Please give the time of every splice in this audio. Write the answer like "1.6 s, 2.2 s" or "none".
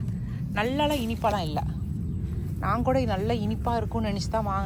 none